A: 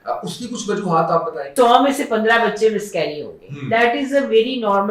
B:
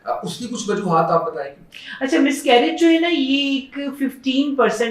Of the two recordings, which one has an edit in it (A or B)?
A